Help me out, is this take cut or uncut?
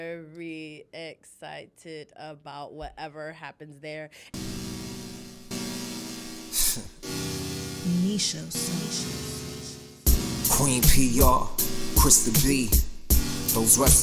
cut